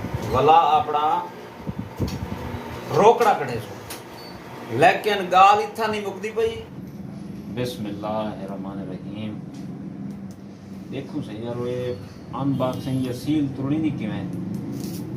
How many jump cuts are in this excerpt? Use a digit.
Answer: 1